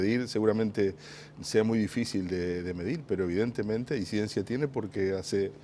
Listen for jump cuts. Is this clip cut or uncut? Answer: uncut